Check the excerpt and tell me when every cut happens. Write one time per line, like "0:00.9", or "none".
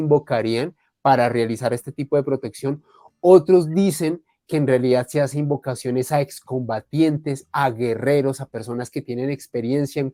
none